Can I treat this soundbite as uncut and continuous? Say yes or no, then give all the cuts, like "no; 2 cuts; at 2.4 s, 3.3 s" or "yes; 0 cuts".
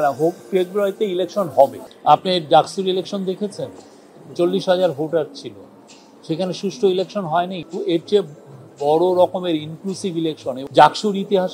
no; 3 cuts; at 1.9 s, 7.6 s, 10.6 s